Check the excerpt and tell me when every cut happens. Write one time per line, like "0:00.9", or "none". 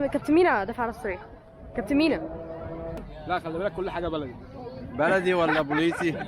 0:03.1